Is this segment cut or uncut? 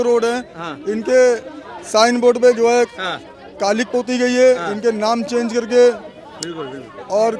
uncut